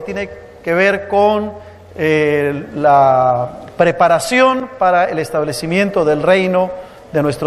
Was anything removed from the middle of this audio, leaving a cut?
yes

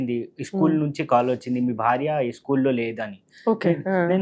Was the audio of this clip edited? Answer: no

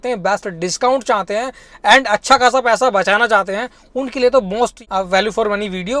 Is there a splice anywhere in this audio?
yes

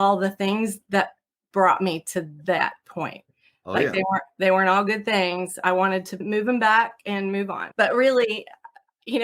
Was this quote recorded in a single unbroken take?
no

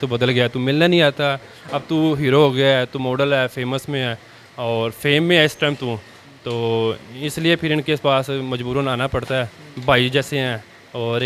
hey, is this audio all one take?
yes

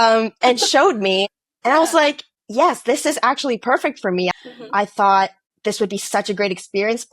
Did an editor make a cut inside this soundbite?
yes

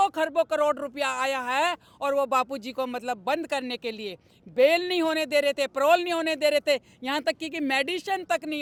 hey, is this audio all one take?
yes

